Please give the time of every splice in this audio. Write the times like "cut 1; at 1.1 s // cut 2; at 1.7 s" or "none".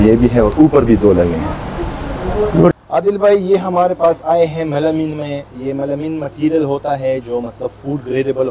cut 1; at 2.7 s